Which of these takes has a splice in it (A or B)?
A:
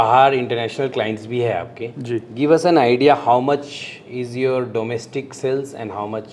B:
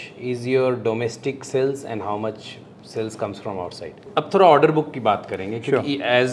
B